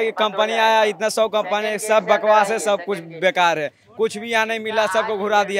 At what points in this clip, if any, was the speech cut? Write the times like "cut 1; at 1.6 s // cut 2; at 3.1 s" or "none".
none